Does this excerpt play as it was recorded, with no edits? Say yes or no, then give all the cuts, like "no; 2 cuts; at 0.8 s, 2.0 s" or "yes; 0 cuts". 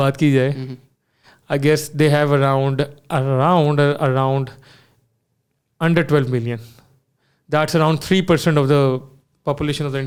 yes; 0 cuts